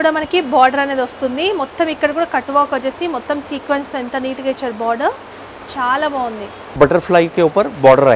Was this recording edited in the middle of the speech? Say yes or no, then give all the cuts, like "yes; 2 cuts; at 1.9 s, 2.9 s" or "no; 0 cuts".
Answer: yes; 1 cut; at 6.7 s